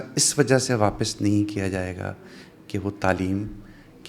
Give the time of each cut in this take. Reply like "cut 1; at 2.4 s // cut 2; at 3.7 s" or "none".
none